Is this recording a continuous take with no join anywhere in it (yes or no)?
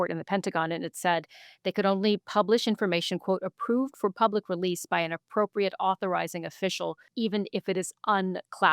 no